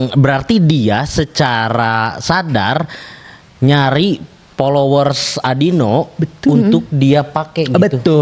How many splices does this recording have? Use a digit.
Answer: 0